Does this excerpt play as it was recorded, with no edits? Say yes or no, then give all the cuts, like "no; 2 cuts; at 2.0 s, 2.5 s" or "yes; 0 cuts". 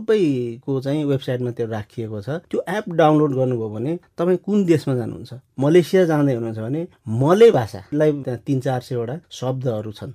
no; 1 cut; at 8.2 s